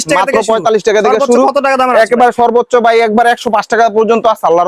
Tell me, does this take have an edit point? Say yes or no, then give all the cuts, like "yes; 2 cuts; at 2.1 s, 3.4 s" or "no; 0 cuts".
no; 0 cuts